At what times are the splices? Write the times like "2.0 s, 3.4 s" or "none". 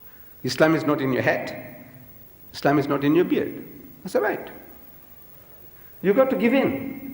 4.8 s